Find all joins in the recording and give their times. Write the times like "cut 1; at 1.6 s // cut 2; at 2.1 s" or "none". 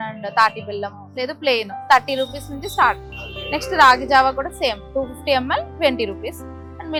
none

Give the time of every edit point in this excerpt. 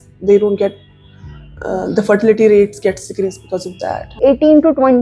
cut 1; at 4.1 s

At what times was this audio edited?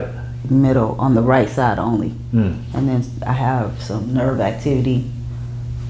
none

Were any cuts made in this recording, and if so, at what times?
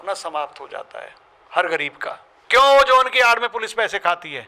cut 1; at 2.3 s

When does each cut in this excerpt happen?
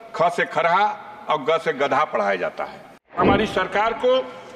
cut 1; at 3.2 s

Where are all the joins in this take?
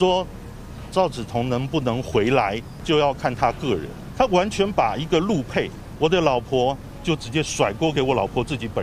cut 1; at 2.7 s // cut 2; at 4.0 s // cut 3; at 5.8 s // cut 4; at 6.9 s

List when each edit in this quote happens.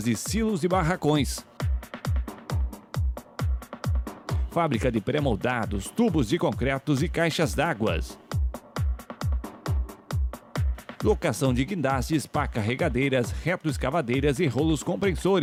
none

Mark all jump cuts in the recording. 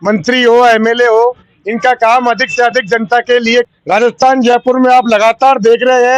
cut 1; at 3.7 s

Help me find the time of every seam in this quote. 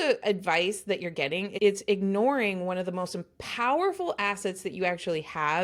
none

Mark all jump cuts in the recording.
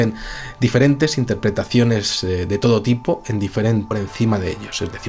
none

